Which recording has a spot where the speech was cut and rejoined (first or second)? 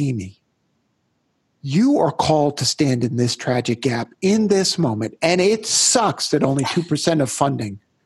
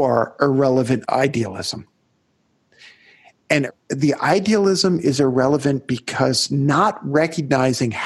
second